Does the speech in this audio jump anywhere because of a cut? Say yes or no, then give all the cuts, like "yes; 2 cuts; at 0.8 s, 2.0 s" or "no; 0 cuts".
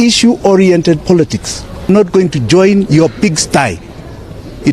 yes; 1 cut; at 1.9 s